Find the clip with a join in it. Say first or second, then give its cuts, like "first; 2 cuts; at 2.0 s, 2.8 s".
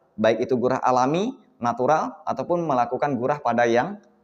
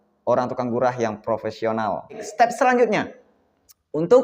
second; 1 cut; at 2.2 s